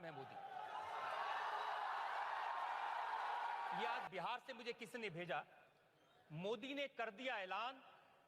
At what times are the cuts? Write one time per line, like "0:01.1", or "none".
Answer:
0:04.0